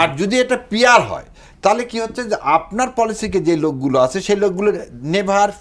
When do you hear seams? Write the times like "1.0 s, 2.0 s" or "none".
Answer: none